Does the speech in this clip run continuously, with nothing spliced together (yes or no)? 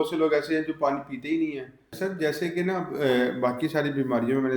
no